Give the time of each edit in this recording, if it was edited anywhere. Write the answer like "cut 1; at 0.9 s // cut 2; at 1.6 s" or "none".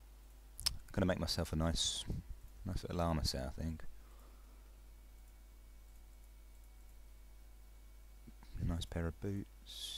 cut 1; at 4.6 s